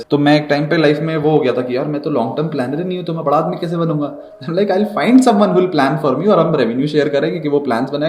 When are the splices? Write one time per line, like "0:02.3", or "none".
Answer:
none